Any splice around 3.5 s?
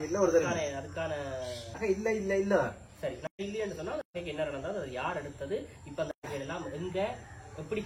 no; 1 cut; at 1.7 s

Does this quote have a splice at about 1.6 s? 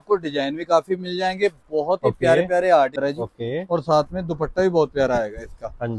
no; 1 cut; at 2.9 s

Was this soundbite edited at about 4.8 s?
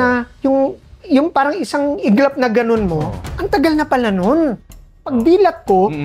yes; 1 cut; at 4.8 s

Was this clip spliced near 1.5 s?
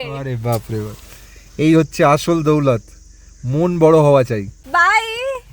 no; 1 cut; at 4.6 s

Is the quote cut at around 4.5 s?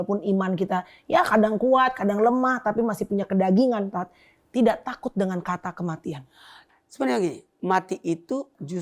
no; 1 cut; at 6.6 s

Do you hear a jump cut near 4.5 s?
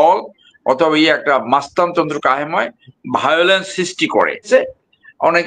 yes; 1 cut; at 4.5 s

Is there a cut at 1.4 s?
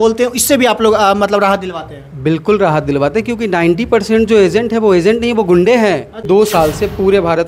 no; 1 cut; at 6.2 s

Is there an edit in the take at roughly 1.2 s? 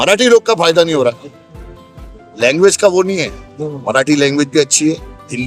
no; 0 cuts

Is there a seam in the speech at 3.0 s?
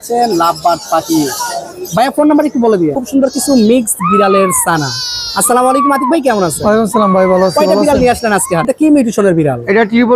yes; 2 cuts; at 3.0 s, 8.7 s

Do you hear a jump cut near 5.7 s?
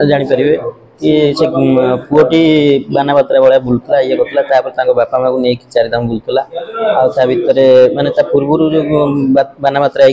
no; 0 cuts

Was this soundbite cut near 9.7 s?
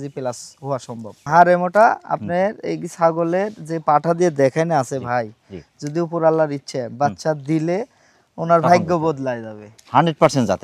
yes; 2 cuts; at 1.2 s, 9.7 s

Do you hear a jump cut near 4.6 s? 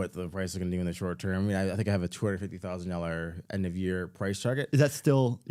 no; 0 cuts

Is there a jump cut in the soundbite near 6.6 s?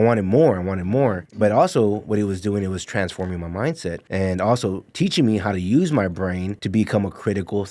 yes; 3 cuts; at 1.2 s, 4.0 s, 6.6 s

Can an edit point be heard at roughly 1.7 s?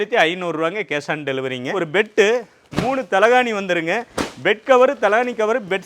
yes; 1 cut; at 1.7 s

